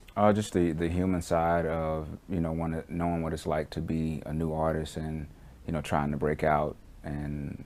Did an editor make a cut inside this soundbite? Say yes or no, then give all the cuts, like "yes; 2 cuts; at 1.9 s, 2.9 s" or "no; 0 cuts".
no; 0 cuts